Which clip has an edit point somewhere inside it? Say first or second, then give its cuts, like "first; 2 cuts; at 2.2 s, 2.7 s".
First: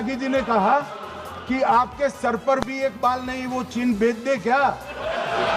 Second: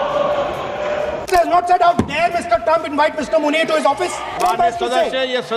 second; 2 cuts; at 1.2 s, 4.4 s